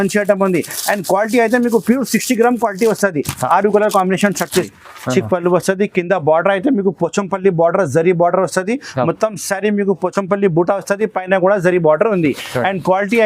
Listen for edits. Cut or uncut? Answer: cut